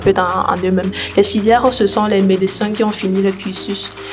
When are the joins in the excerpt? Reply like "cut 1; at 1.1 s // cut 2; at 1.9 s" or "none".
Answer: none